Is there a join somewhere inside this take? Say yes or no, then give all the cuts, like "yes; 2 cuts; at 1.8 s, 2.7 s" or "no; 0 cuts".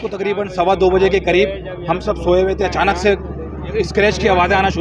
no; 0 cuts